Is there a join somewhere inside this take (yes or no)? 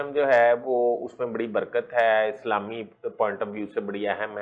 no